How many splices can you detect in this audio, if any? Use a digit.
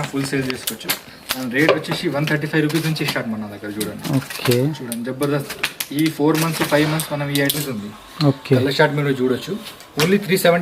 1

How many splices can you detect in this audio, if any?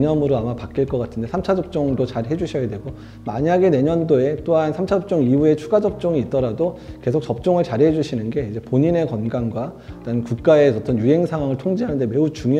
0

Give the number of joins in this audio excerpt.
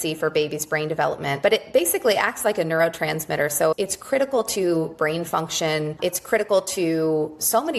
2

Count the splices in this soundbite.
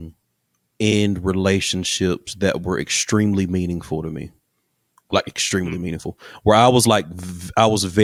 0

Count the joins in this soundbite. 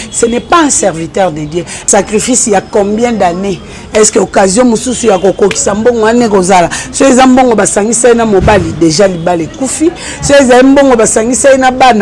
1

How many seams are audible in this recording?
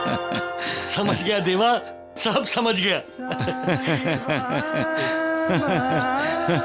0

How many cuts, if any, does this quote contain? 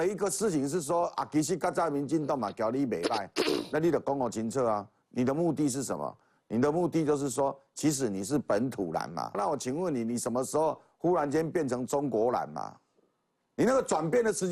1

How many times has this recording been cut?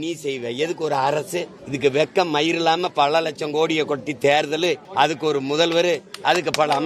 2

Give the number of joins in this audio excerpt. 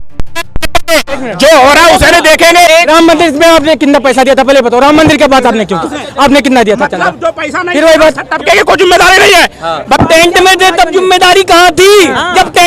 2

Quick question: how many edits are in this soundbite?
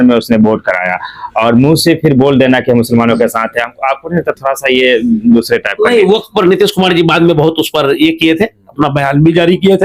0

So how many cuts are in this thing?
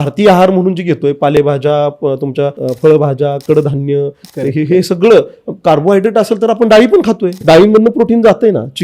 2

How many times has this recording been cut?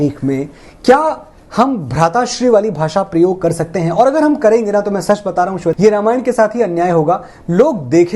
0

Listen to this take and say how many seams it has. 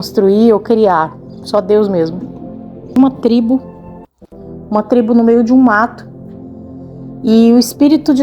1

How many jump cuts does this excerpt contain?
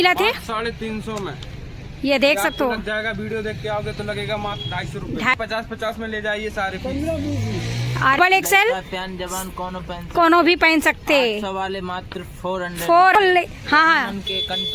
3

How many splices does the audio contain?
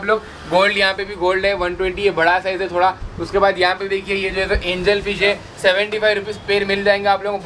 0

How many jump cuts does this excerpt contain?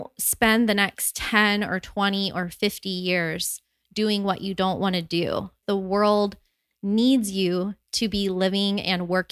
1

